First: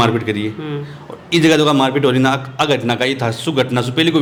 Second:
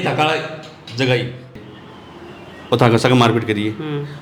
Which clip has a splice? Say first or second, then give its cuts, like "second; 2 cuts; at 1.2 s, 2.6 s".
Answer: second; 1 cut; at 1.6 s